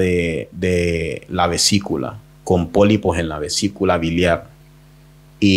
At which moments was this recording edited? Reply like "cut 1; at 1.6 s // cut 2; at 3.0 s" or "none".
none